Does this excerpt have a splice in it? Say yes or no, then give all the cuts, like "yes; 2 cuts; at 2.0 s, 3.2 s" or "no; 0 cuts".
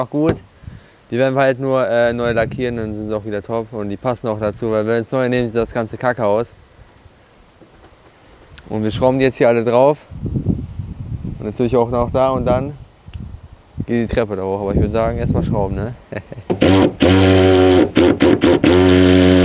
yes; 1 cut; at 16.5 s